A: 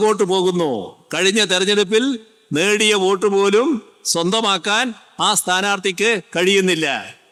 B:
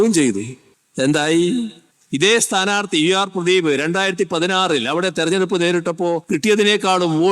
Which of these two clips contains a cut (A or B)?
B